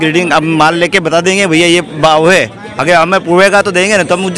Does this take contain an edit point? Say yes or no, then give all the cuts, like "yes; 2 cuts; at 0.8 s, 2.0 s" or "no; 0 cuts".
no; 0 cuts